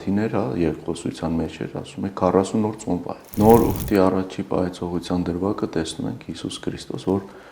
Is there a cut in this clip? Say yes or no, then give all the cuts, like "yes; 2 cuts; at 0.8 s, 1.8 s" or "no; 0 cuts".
yes; 1 cut; at 3.2 s